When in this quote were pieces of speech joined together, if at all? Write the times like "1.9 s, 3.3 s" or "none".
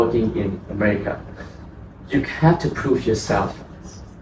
none

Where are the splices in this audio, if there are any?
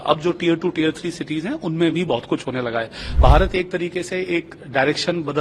3.0 s

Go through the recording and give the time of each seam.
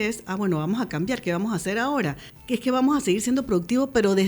2.3 s

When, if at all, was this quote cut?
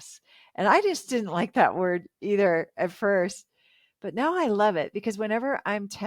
none

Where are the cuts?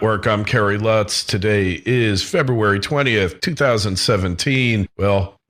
none

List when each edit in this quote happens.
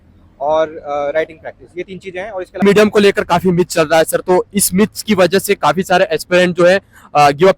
2.6 s

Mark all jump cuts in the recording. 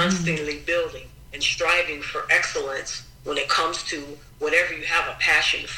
none

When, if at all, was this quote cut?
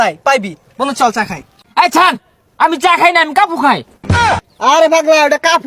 1.5 s, 4.3 s

